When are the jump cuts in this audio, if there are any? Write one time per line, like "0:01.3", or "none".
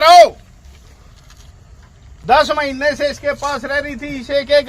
0:02.2